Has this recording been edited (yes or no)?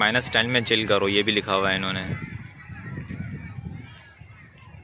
no